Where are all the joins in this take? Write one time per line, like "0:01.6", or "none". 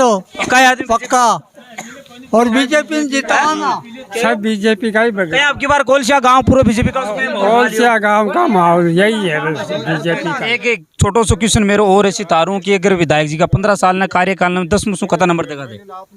0:10.4